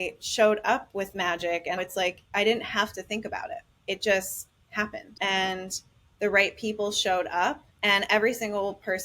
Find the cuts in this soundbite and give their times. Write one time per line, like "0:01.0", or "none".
0:01.8
0:03.7
0:05.0
0:07.7

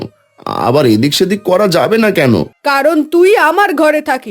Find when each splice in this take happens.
0:02.5

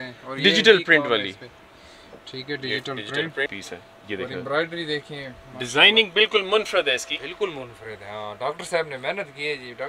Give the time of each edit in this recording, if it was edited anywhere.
0:03.5

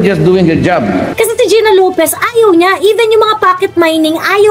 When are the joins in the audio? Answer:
0:01.1

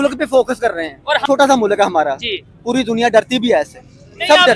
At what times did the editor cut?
0:01.2

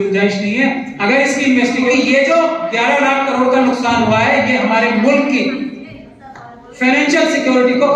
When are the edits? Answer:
0:01.9

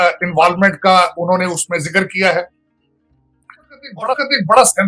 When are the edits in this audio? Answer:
0:04.0

